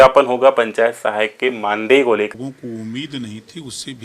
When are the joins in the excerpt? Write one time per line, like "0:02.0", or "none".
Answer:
0:02.3